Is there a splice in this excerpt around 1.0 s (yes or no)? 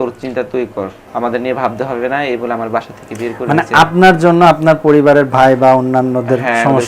yes